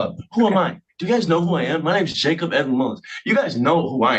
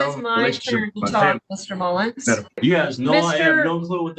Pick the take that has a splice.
second; 1 cut; at 2.6 s

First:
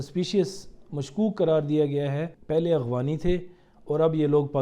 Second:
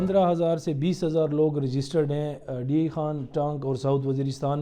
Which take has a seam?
first; 1 cut; at 2.3 s

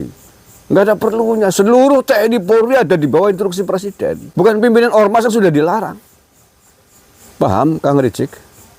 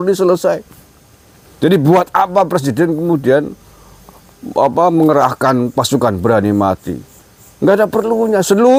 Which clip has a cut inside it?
first; 1 cut; at 4.2 s

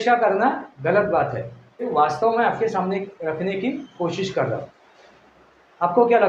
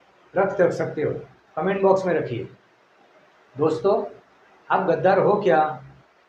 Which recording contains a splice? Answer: first; 1 cut; at 1.9 s

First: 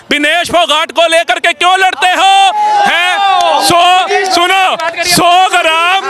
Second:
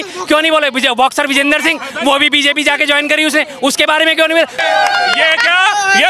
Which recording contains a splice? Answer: second; 1 cut; at 4.6 s

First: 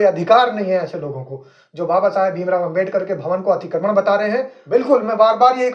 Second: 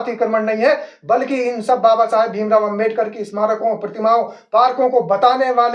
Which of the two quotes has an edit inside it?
first; 1 cut; at 4.5 s

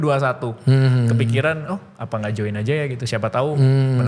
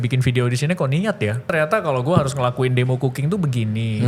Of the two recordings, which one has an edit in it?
second; 1 cut; at 1.5 s

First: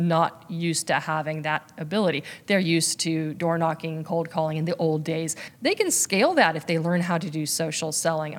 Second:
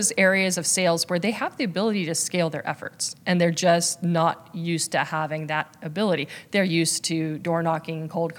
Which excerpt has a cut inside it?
first; 1 cut; at 5.4 s

